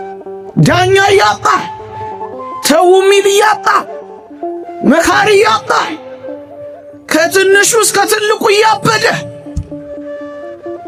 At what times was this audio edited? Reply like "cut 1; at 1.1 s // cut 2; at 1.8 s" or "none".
none